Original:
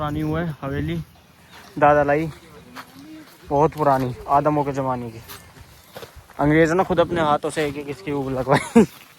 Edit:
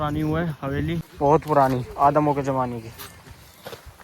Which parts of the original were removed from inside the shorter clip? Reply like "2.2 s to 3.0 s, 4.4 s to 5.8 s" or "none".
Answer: 1.1 s to 3.4 s